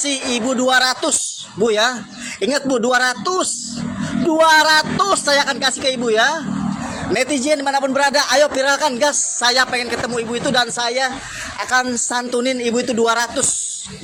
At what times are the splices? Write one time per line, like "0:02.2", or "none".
none